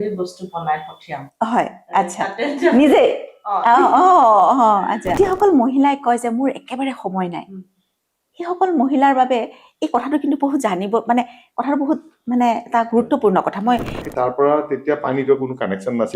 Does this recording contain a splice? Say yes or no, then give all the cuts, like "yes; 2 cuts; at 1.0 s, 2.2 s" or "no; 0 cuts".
yes; 2 cuts; at 5.1 s, 14.0 s